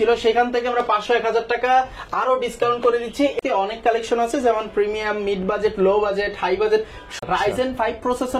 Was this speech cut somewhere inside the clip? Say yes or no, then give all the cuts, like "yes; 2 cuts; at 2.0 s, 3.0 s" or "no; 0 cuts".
yes; 2 cuts; at 3.3 s, 7.1 s